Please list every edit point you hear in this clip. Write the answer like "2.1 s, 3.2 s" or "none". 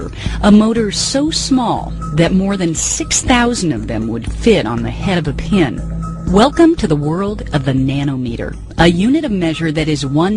1.0 s